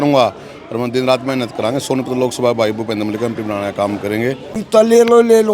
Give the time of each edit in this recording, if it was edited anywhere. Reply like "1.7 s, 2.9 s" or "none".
4.6 s